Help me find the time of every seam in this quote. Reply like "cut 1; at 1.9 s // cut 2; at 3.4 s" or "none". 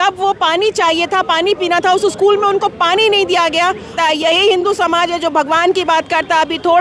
cut 1; at 3.9 s